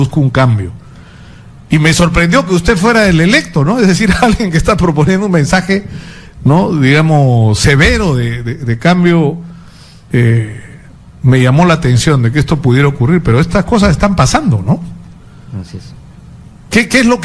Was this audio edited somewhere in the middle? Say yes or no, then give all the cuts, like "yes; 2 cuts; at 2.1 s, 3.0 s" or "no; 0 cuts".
yes; 1 cut; at 9.4 s